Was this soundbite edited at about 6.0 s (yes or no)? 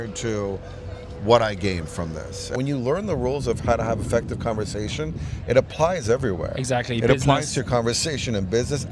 no